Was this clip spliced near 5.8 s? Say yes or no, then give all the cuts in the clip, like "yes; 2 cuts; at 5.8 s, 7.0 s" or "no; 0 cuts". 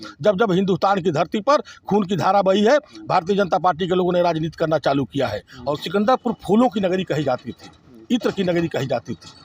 yes; 1 cut; at 5.8 s